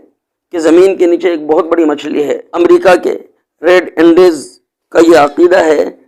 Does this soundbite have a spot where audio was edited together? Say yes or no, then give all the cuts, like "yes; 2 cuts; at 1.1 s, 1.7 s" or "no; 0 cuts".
yes; 1 cut; at 2.4 s